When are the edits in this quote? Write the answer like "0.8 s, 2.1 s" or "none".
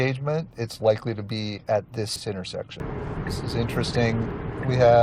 2.8 s